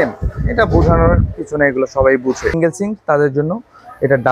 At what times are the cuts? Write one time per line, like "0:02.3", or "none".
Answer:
0:02.6

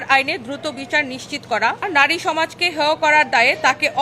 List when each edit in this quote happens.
0:01.9

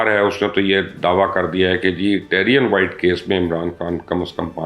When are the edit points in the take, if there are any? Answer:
none

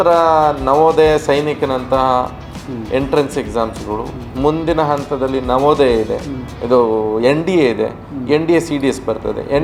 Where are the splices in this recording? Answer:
none

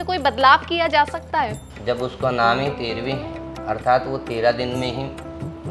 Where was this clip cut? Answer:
0:01.7

